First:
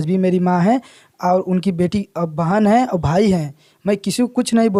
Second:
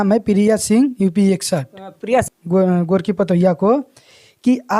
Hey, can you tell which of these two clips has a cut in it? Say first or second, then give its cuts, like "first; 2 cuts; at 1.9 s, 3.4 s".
second; 1 cut; at 2.2 s